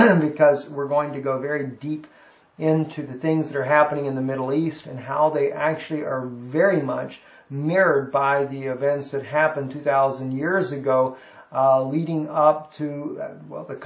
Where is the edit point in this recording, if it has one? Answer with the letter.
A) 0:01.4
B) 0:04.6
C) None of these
A